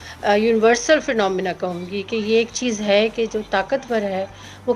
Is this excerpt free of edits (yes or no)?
yes